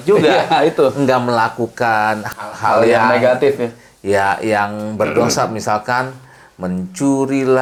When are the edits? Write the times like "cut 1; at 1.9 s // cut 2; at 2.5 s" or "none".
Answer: none